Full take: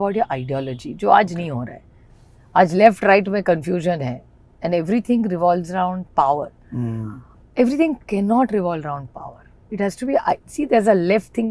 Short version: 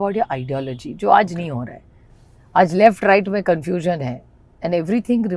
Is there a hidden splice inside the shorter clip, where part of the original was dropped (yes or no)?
no